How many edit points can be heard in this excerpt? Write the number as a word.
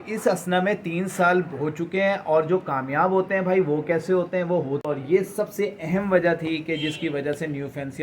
one